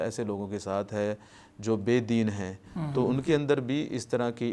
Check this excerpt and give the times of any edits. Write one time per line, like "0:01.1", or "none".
none